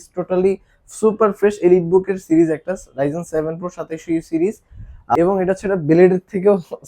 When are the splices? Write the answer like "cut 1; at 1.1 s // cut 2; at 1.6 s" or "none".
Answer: cut 1; at 5.2 s